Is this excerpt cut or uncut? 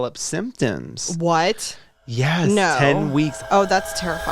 cut